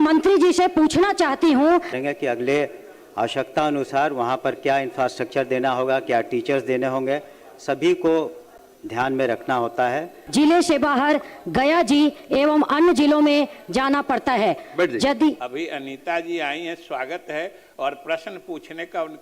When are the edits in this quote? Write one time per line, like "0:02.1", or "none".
0:01.9
0:10.1
0:15.5